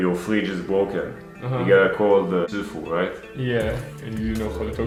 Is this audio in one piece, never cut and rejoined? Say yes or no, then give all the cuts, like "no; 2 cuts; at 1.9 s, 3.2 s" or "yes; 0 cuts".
yes; 0 cuts